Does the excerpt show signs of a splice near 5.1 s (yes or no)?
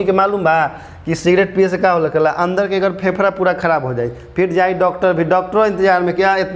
no